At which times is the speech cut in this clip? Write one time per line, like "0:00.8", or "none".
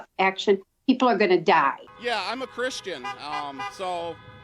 0:01.9